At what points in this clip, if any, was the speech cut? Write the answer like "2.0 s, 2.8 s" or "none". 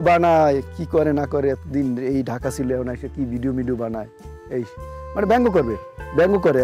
none